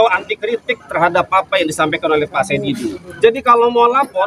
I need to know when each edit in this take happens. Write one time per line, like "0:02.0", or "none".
0:03.0

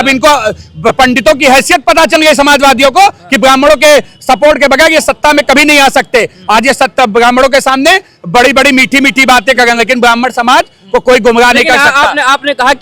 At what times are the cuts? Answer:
none

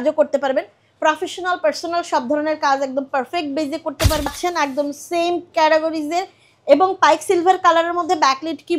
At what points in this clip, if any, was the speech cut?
0:04.3

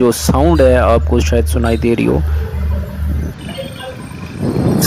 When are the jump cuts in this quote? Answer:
0:03.3

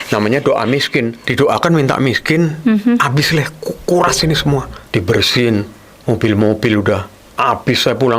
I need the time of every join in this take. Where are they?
0:01.2
0:04.8

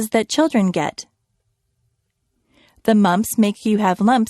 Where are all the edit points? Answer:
0:01.4

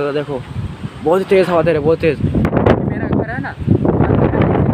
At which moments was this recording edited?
0:02.5

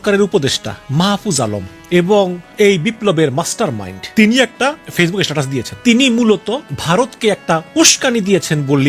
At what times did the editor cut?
0:01.7
0:02.4
0:03.9
0:04.6
0:05.7
0:06.7

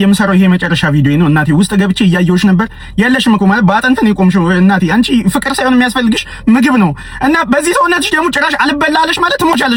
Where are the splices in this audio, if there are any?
none

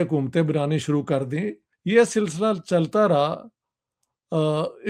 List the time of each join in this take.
0:01.7

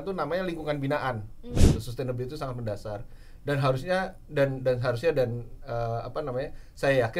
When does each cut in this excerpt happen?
0:01.6

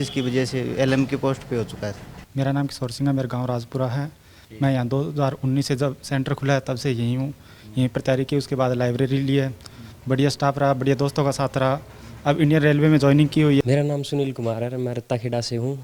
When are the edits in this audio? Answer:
none

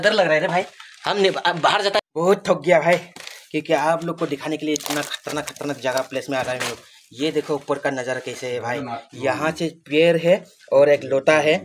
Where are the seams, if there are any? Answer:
0:02.0

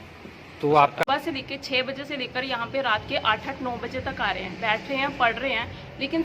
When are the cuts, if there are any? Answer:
0:01.0

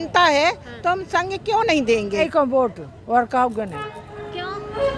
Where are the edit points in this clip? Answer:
0:02.2

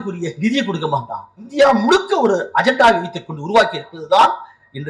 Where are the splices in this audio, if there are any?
0:01.4

